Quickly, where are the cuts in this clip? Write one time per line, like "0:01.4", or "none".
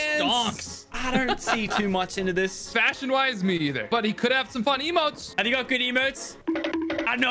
0:00.9
0:02.7